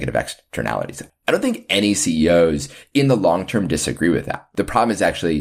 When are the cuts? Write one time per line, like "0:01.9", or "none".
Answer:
0:01.1
0:04.4